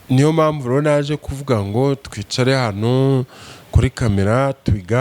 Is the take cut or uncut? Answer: uncut